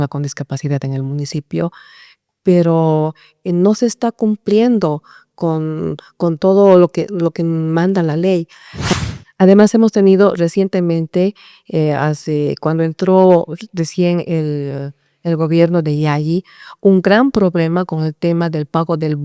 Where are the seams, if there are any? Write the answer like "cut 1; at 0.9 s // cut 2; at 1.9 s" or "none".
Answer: cut 1; at 8.9 s